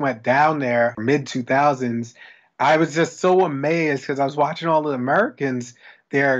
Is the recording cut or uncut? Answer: cut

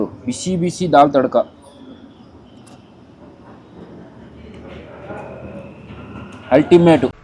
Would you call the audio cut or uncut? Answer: uncut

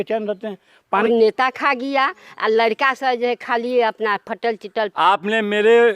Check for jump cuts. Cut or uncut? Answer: cut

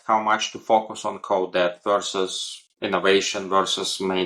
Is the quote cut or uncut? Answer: uncut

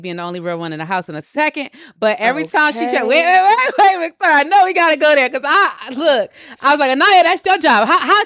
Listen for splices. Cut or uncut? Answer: uncut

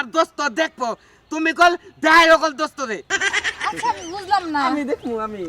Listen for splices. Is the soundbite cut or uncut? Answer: cut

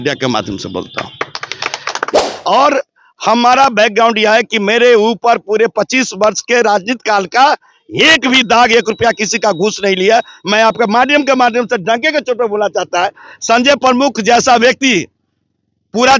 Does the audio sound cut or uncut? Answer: cut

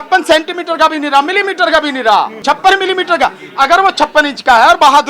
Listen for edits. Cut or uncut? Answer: cut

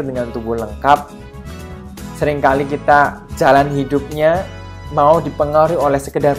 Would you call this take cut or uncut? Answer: uncut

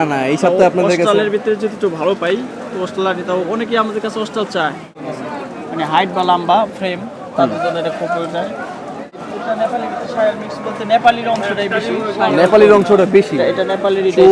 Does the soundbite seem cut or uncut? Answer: cut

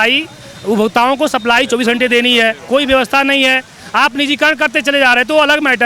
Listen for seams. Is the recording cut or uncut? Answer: cut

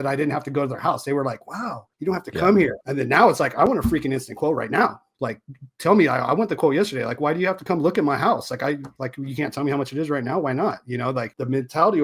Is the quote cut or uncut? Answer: uncut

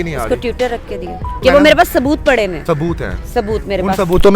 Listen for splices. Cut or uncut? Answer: cut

